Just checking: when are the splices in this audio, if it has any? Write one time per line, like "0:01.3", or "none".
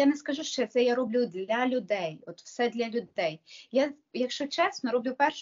none